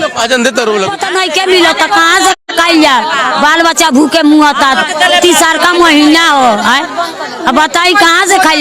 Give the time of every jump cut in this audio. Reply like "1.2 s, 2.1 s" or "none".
1.0 s

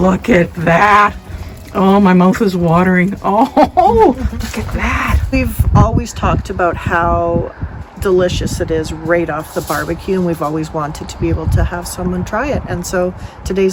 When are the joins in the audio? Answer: none

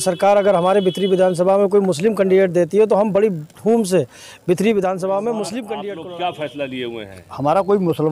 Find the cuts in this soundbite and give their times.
5.7 s

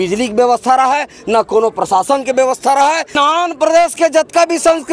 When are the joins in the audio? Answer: 3.2 s

